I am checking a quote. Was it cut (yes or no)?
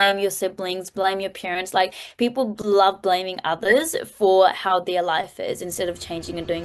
no